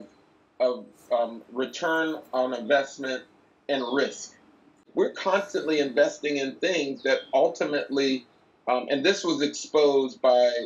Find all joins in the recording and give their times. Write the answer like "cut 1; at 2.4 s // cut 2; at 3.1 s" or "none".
cut 1; at 4.8 s